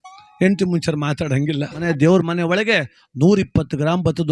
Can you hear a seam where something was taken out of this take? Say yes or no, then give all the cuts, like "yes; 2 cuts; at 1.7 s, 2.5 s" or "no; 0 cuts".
yes; 1 cut; at 1.8 s